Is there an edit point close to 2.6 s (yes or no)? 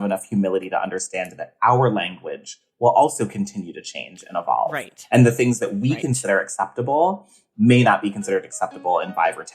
no